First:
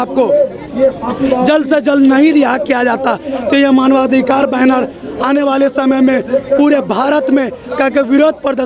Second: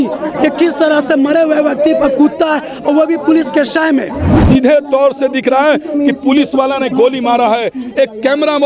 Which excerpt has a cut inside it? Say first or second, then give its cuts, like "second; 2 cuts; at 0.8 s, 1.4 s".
second; 1 cut; at 4.3 s